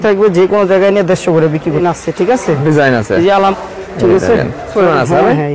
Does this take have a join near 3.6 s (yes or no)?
yes